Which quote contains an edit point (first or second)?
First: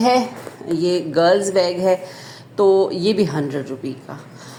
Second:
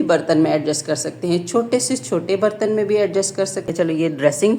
second